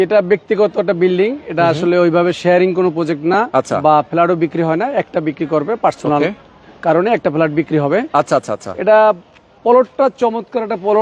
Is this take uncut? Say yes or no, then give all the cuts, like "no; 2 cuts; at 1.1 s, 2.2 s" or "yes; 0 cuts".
yes; 0 cuts